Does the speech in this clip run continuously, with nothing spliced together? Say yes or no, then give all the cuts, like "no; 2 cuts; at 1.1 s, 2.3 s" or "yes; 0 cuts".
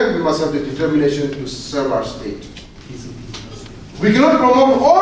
no; 1 cut; at 2.8 s